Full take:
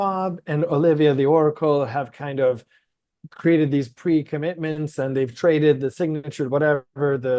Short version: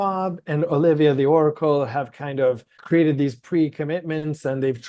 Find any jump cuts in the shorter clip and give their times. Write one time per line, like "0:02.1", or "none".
0:02.7